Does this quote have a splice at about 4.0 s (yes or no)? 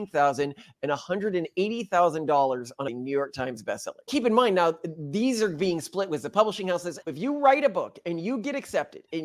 yes